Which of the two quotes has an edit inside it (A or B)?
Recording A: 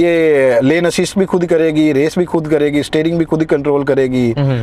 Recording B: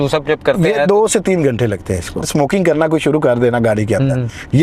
B